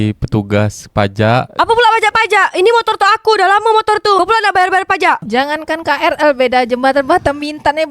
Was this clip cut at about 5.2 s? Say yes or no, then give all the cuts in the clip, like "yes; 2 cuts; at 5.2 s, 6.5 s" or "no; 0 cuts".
yes; 2 cuts; at 1.5 s, 5.2 s